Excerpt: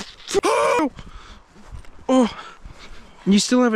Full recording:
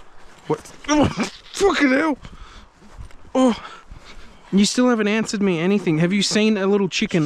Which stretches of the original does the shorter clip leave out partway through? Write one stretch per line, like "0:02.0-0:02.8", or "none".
none